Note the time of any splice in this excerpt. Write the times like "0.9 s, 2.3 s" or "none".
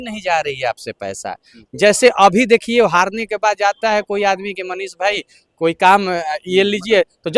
none